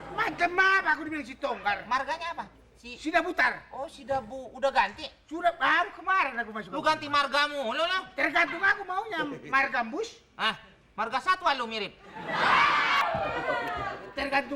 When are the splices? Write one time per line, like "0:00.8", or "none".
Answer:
0:12.8